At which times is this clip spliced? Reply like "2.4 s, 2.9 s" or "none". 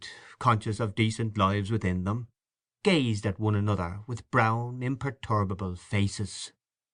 6.0 s

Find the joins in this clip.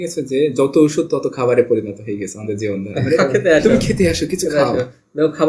2.9 s

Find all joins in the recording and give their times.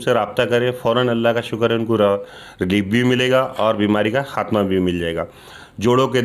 none

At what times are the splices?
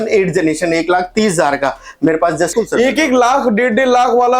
2.5 s

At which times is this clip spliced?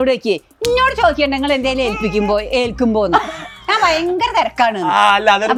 none

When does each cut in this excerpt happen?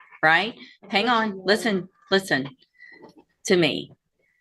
none

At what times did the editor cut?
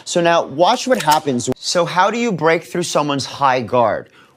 none

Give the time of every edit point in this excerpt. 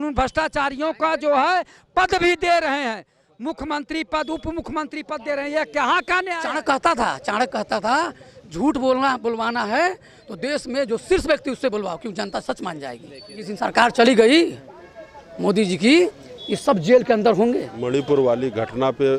6.5 s, 13.4 s, 17.7 s

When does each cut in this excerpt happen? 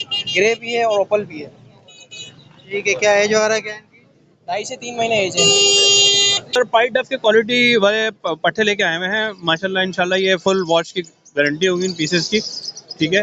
6.4 s

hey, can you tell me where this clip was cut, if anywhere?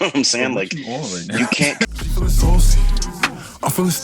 1.8 s

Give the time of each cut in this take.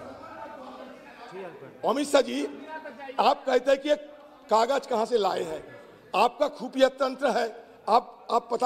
none

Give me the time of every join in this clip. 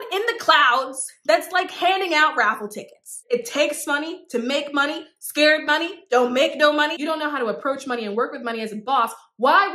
3.2 s, 7.0 s

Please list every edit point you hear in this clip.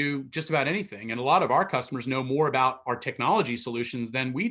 none

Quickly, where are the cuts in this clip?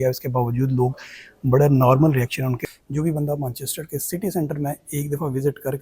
2.6 s

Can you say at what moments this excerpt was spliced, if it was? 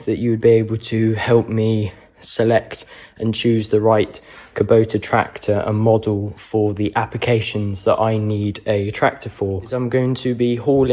9.7 s

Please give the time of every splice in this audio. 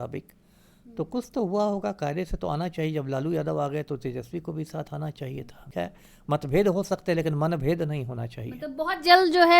5.7 s

